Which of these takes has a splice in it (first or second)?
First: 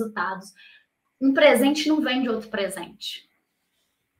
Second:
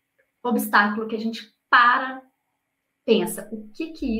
first